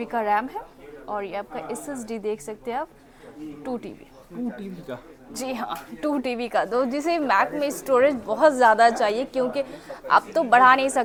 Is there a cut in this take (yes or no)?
no